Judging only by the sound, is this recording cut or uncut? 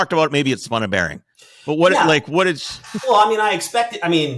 cut